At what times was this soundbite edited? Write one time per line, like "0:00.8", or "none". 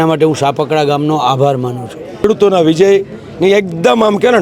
0:02.2